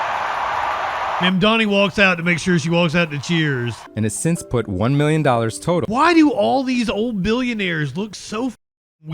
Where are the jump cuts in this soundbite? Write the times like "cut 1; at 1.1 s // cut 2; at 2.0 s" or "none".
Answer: cut 1; at 3.8 s